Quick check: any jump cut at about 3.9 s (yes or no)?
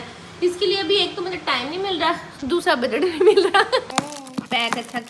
yes